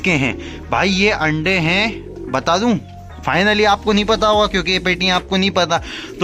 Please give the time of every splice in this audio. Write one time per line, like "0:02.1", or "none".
none